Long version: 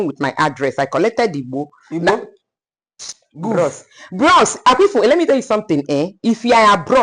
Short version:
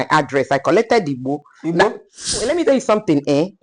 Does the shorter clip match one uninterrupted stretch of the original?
no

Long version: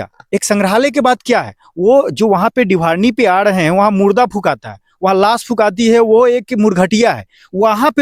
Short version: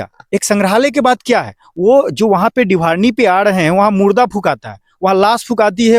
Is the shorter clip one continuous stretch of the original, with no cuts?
yes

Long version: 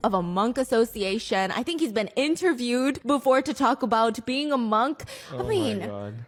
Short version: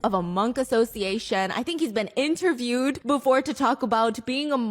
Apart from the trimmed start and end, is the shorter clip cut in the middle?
no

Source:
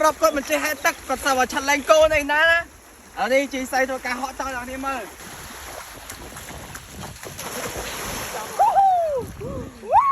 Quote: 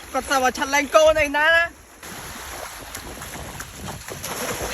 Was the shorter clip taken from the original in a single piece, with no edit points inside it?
no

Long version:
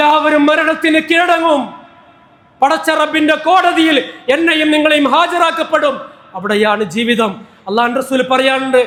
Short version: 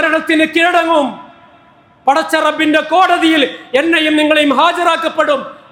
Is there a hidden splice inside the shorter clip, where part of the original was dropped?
no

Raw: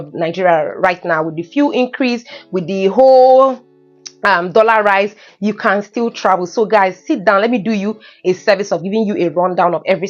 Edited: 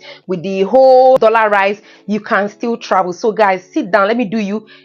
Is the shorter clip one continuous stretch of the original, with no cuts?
no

